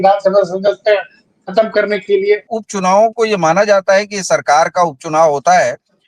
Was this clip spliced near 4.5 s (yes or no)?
no